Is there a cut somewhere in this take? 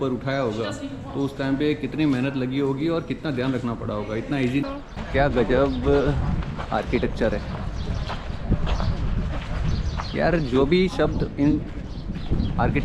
yes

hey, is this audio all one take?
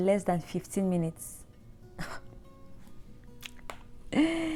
yes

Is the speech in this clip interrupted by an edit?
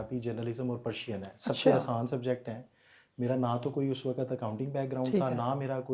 no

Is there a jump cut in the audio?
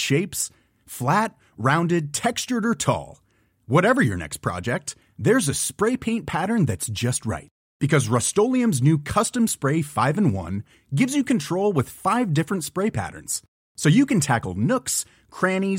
no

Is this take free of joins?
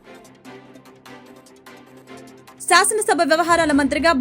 no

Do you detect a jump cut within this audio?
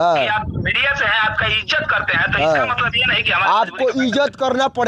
no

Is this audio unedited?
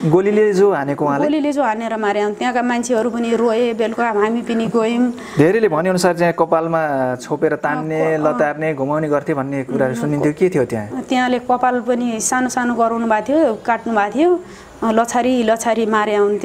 yes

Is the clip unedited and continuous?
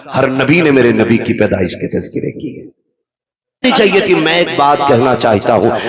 no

